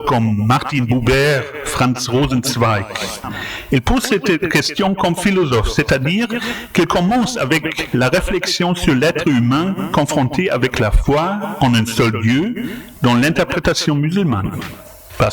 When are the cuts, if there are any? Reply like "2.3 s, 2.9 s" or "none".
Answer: 3.2 s